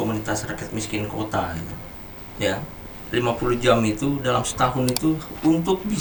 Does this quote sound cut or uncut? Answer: cut